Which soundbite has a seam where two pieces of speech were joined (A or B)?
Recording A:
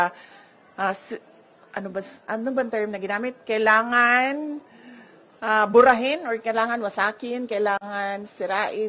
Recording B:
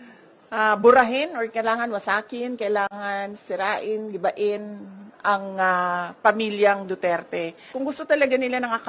B